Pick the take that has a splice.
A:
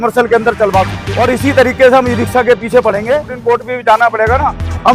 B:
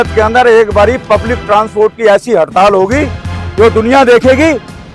A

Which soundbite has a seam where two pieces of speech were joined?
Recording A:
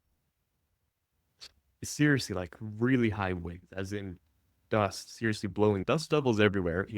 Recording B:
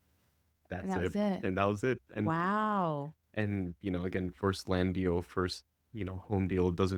A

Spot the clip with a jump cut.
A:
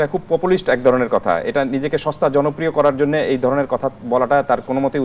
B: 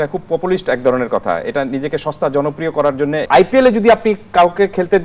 B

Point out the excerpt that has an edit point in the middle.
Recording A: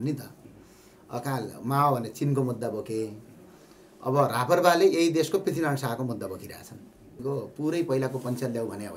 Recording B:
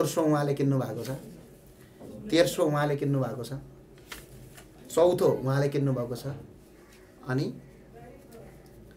A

